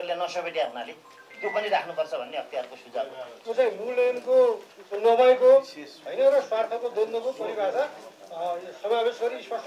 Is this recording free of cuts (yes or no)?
no